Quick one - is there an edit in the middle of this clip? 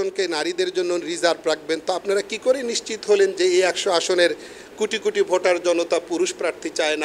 no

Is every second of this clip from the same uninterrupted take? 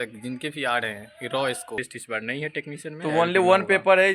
no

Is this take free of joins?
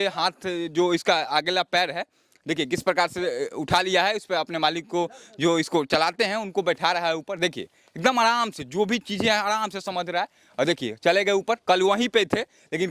yes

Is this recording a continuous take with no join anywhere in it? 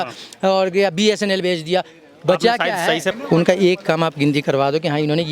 no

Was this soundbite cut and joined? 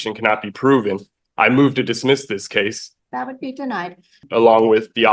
yes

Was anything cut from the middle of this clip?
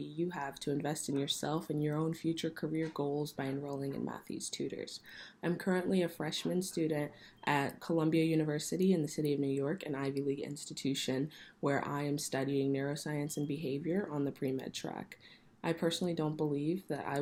no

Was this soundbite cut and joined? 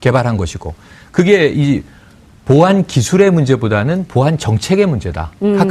yes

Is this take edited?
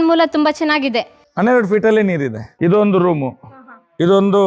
no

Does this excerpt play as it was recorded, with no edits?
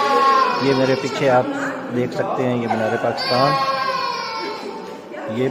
yes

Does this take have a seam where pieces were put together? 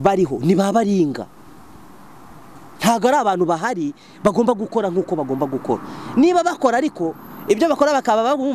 no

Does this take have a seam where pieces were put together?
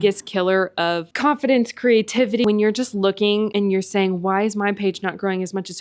yes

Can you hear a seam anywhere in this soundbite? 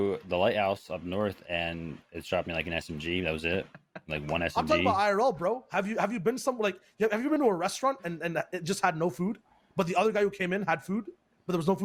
no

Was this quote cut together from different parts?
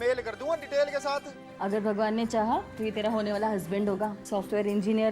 yes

